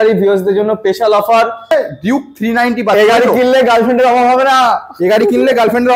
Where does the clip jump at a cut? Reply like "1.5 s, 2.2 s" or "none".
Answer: 1.7 s